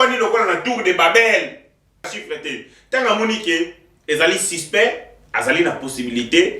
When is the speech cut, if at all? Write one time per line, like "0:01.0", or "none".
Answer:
0:02.1